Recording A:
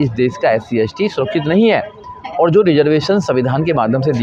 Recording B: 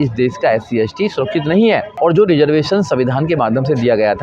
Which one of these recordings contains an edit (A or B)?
B